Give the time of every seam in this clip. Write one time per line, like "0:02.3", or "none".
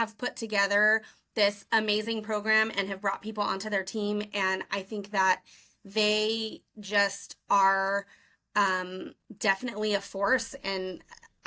none